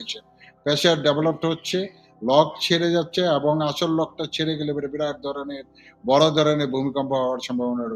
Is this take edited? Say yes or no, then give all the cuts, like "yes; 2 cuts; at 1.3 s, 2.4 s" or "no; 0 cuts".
no; 0 cuts